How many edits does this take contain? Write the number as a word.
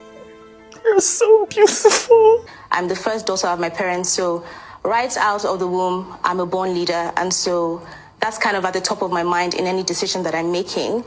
one